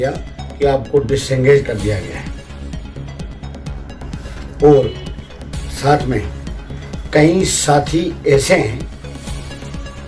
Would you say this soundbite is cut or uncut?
cut